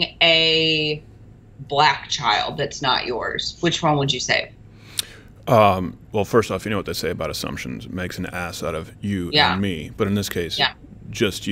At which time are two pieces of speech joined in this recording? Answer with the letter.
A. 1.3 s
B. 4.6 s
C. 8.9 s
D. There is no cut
D